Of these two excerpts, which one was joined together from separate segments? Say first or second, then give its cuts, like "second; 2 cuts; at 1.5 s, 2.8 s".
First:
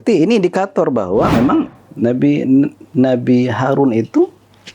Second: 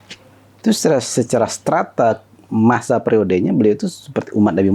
first; 1 cut; at 1.7 s